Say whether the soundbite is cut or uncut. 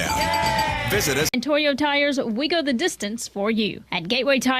cut